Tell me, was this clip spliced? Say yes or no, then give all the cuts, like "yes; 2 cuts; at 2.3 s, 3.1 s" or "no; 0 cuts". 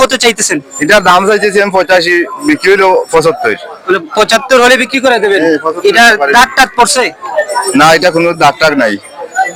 no; 0 cuts